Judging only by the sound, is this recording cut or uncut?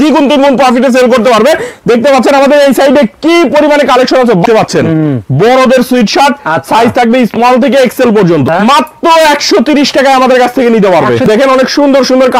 cut